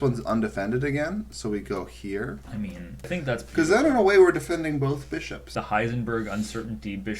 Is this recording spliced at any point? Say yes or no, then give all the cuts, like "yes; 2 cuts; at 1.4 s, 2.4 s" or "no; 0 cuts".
yes; 2 cuts; at 3.1 s, 5.6 s